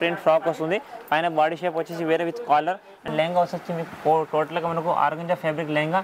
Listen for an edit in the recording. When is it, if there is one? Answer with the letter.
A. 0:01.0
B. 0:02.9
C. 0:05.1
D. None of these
B